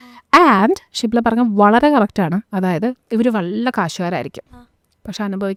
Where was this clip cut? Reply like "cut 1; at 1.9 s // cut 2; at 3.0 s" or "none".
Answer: none